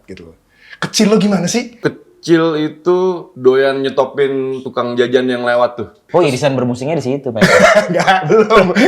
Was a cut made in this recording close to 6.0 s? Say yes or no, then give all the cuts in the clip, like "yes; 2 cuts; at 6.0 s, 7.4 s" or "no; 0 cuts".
yes; 4 cuts; at 1.8 s, 3.3 s, 4.6 s, 6.0 s